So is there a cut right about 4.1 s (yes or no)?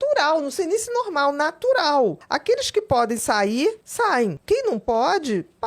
yes